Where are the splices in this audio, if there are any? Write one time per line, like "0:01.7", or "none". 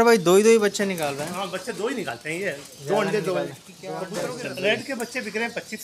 0:04.1

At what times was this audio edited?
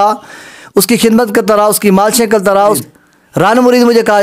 0:02.8

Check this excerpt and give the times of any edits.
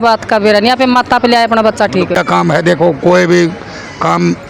0:02.1

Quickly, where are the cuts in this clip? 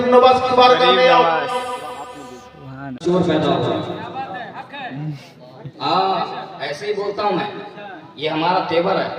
0:03.0

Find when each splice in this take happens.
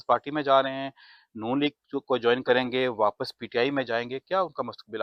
none

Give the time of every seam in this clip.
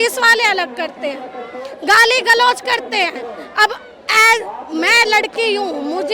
none

